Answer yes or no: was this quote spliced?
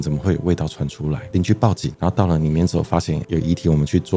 yes